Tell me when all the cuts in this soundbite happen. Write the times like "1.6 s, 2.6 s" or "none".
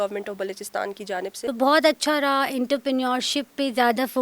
1.4 s